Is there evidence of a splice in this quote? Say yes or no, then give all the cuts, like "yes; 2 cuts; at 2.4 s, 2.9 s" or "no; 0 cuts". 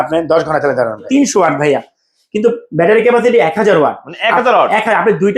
yes; 1 cut; at 1.1 s